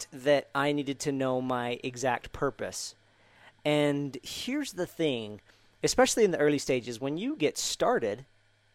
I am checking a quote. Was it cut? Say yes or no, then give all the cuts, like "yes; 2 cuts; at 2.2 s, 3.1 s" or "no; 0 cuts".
no; 0 cuts